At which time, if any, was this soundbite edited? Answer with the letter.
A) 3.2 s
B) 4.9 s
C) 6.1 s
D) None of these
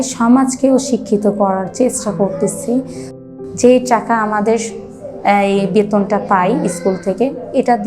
A